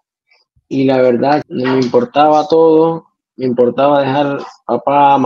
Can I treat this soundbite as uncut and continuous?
no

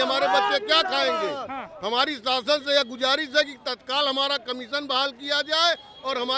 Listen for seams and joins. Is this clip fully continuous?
yes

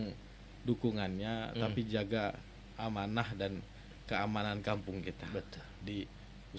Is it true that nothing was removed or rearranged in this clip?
yes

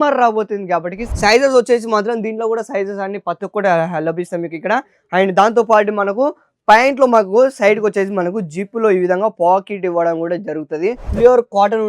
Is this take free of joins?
no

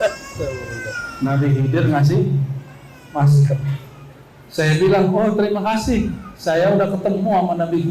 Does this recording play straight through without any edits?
yes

